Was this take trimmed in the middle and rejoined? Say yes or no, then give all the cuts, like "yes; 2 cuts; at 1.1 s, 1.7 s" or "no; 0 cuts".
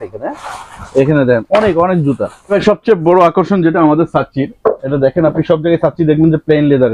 yes; 1 cut; at 2.5 s